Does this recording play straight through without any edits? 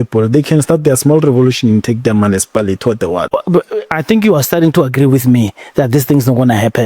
no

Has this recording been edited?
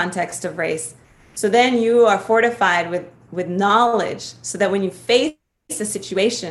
no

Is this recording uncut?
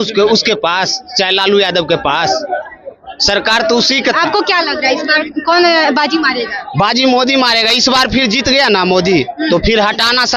yes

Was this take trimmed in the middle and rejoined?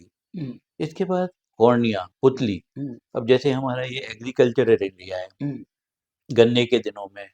no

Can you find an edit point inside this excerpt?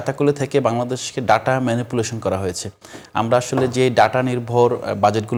no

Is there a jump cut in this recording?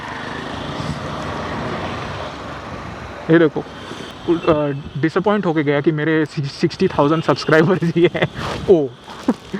no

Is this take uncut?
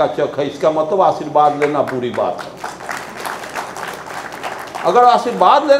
yes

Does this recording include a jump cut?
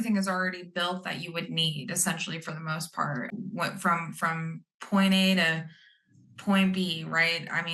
no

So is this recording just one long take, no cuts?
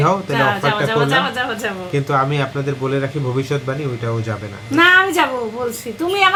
yes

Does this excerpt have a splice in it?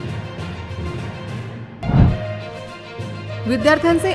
no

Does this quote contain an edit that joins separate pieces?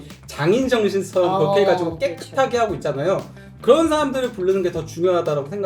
no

